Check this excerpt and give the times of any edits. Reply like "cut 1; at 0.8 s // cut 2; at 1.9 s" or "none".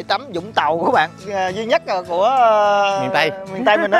cut 1; at 1.2 s